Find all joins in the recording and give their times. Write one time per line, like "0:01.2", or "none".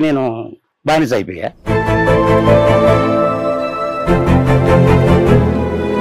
0:01.6

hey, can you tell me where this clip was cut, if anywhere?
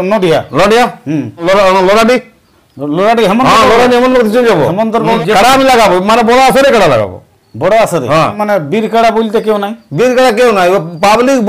0:01.4
0:05.2
0:08.4

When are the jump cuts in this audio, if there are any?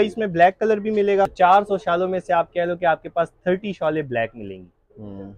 0:01.3

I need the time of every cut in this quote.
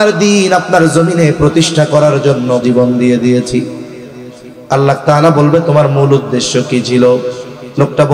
0:02.6

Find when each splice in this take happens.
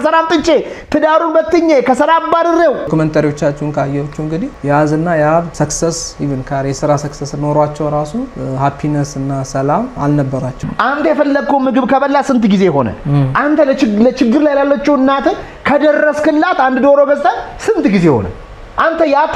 0:02.9
0:04.5
0:05.5
0:08.3
0:10.5

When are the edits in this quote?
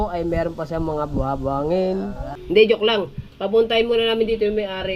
0:02.3

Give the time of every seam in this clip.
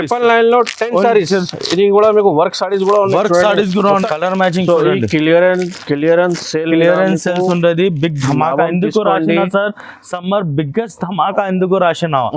0:03.9

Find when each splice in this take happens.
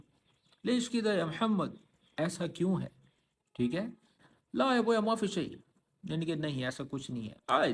0:04.2

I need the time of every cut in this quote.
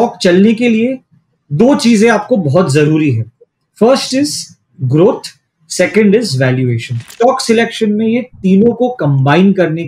0:07.0

